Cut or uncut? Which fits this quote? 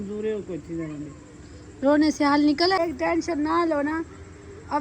cut